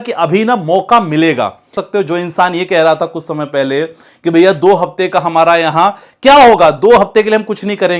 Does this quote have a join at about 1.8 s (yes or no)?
yes